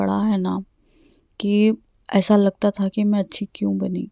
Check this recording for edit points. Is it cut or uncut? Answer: uncut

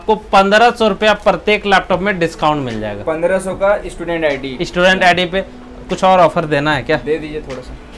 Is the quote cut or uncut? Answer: uncut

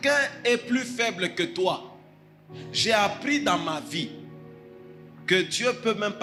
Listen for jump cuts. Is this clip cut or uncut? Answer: uncut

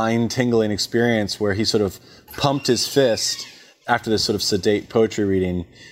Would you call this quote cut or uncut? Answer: uncut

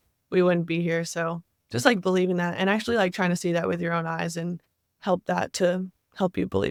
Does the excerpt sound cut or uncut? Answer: uncut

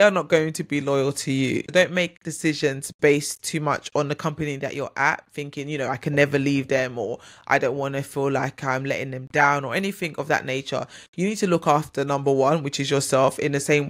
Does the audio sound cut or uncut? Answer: uncut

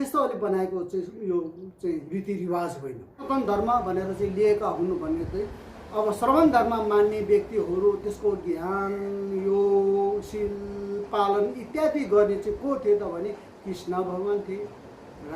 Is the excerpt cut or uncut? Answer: cut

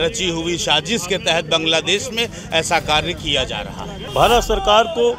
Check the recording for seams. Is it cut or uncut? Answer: cut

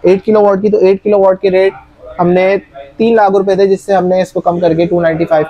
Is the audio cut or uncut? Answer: uncut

